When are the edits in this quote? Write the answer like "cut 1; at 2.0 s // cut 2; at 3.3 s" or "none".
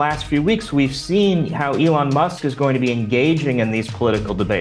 none